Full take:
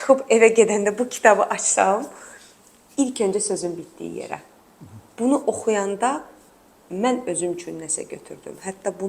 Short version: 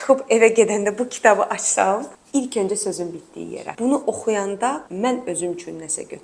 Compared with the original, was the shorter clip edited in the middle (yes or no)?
yes